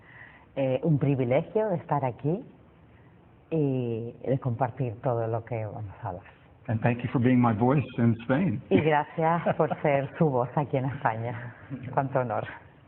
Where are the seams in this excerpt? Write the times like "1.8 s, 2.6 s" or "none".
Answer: 7.7 s